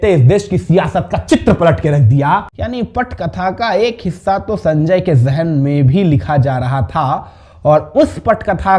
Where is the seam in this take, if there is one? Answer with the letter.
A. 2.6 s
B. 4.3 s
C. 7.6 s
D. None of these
A